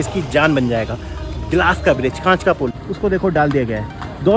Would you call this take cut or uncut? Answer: cut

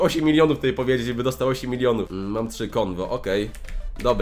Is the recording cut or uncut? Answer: uncut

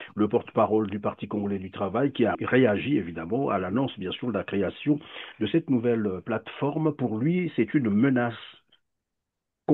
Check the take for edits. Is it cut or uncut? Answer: cut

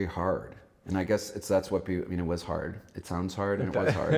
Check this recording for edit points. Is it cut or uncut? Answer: uncut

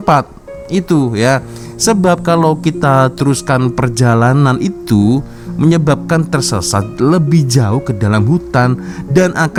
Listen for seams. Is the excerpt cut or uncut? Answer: uncut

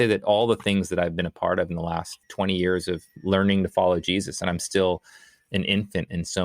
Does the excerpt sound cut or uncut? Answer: uncut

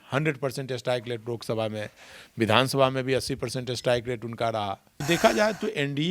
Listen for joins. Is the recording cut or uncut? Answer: cut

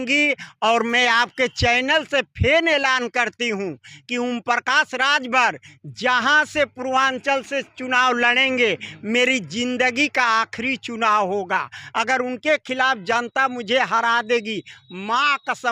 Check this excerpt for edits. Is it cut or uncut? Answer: uncut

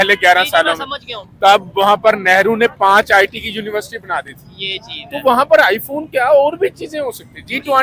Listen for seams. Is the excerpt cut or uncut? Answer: uncut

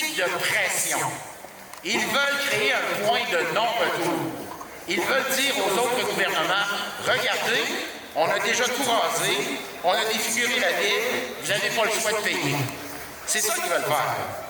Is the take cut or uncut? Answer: uncut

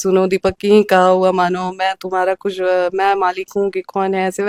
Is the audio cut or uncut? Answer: uncut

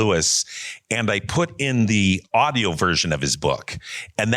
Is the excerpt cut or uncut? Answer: cut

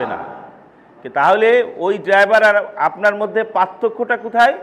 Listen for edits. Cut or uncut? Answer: uncut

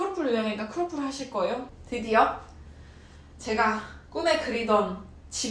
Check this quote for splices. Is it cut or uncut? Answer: cut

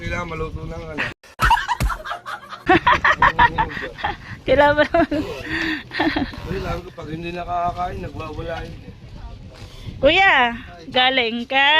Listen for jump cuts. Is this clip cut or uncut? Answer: uncut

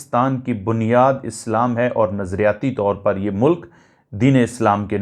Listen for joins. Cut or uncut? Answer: uncut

